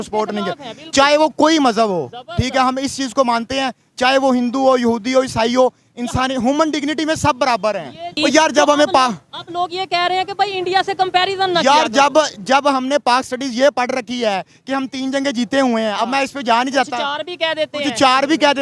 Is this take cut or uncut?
cut